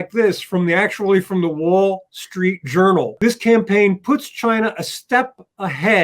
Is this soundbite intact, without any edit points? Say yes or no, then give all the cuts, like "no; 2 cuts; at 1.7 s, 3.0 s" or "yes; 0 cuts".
no; 1 cut; at 3.1 s